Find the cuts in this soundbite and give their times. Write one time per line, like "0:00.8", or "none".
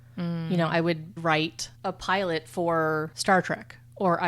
0:01.2
0:03.1